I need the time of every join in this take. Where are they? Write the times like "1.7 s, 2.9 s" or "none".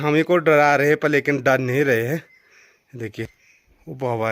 none

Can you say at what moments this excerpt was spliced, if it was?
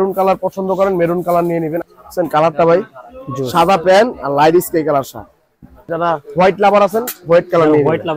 1.8 s, 5.9 s

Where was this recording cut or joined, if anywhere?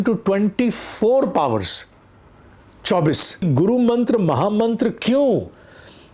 3.4 s

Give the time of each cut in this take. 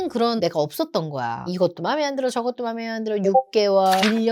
1.5 s

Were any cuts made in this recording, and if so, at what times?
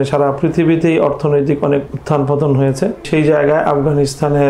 1.9 s, 3.1 s

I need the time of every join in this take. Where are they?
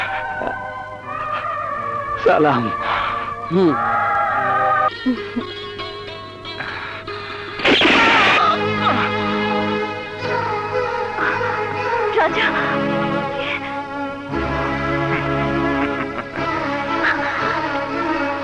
4.9 s

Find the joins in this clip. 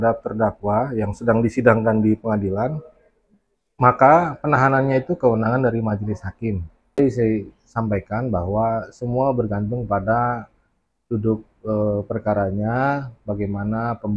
7.0 s

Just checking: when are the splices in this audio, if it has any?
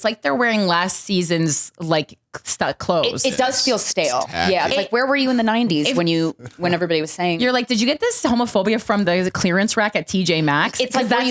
none

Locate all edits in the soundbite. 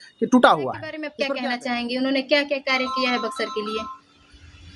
1.0 s

